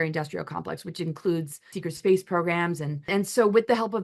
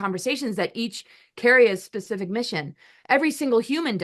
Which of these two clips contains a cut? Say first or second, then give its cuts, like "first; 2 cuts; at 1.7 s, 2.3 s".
first; 2 cuts; at 1.7 s, 3.1 s